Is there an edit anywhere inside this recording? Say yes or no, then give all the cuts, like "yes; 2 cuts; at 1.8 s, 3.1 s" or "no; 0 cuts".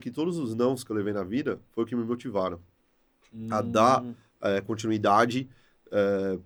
no; 0 cuts